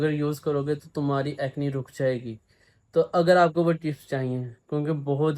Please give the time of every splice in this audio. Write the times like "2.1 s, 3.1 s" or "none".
none

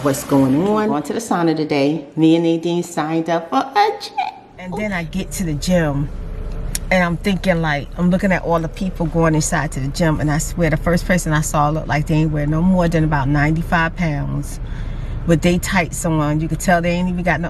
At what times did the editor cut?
1.0 s, 4.8 s

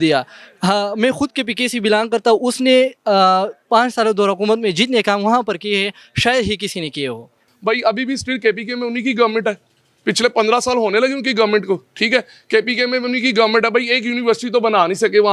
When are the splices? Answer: 7.4 s

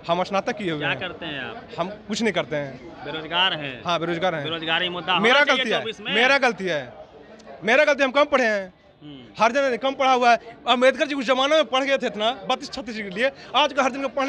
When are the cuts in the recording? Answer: none

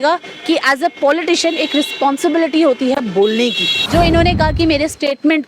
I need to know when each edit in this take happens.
3.8 s

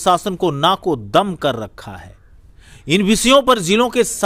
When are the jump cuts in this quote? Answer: none

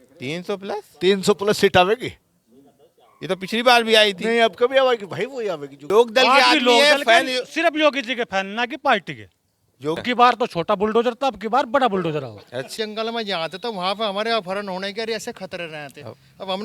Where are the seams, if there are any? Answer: 5.7 s, 10.0 s, 12.7 s

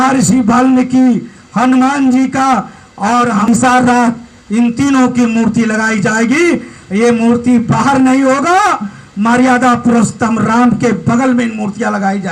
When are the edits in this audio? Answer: 3.4 s

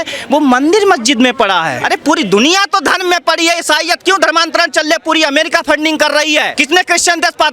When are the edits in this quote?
1.8 s, 6.5 s

